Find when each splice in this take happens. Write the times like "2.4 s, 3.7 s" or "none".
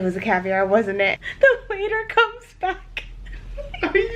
1.1 s